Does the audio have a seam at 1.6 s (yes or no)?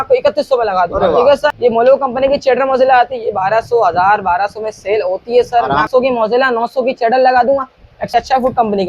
yes